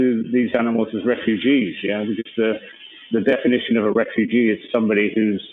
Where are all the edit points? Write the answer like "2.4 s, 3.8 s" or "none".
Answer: none